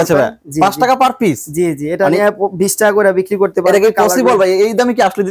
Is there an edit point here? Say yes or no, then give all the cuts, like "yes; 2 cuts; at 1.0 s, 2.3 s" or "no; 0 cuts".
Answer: no; 0 cuts